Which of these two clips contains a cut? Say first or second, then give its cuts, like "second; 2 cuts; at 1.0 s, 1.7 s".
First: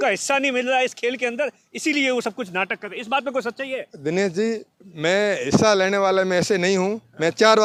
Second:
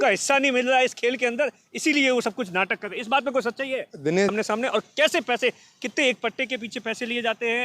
second; 1 cut; at 4.3 s